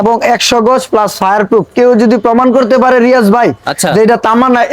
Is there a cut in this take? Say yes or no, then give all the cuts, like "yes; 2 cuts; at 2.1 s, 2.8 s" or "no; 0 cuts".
no; 0 cuts